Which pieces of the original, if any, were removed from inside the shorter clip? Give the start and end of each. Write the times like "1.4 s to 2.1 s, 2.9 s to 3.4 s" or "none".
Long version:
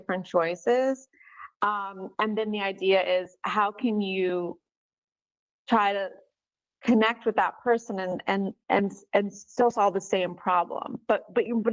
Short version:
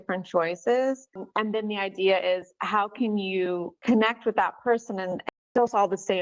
1.2 s to 2.0 s, 4.6 s to 6.7 s, 8.2 s to 9.3 s